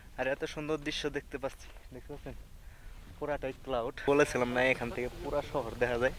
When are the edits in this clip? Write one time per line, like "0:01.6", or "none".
0:04.0